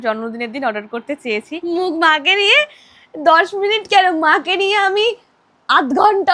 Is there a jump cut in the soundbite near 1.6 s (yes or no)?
yes